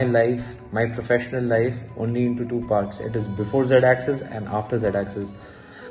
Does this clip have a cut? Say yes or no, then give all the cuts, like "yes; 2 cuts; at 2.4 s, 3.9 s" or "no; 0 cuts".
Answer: no; 0 cuts